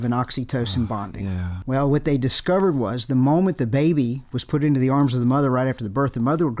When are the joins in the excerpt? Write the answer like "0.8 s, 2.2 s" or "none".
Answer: 1.5 s